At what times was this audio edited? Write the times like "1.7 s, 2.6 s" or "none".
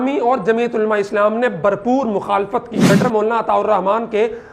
2.9 s